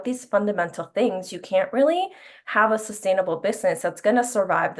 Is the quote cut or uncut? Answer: uncut